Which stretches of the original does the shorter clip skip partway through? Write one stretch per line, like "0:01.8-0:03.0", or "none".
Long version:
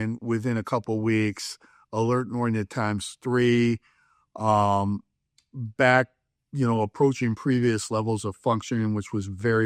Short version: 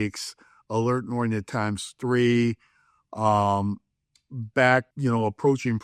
0:06.1-0:06.5

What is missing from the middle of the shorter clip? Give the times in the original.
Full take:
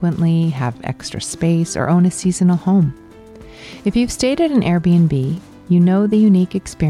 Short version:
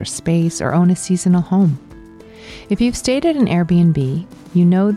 none

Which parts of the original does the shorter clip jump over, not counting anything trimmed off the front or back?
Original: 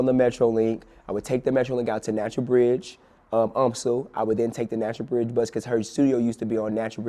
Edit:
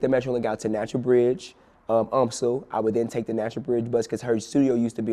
none

